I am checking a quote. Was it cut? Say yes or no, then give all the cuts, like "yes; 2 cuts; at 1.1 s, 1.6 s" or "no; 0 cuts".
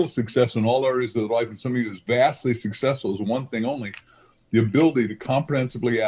no; 0 cuts